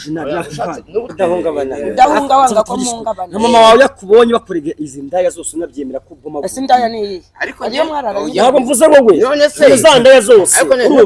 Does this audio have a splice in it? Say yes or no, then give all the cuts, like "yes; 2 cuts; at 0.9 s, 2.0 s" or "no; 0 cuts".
yes; 1 cut; at 1.1 s